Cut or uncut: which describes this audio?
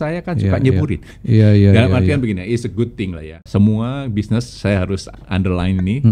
cut